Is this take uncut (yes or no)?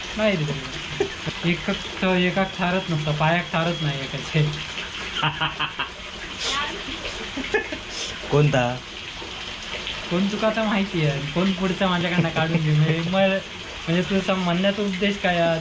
yes